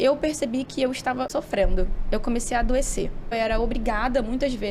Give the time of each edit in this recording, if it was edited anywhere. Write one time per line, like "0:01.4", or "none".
0:01.3
0:03.3